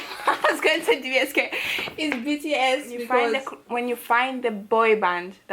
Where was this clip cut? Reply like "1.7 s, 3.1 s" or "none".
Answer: 3.5 s